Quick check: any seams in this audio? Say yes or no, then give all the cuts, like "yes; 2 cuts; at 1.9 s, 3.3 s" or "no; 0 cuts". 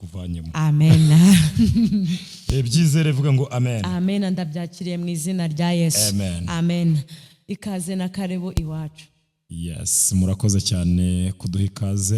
no; 0 cuts